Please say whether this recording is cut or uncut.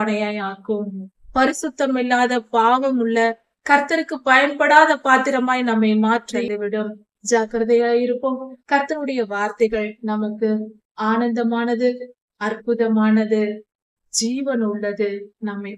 cut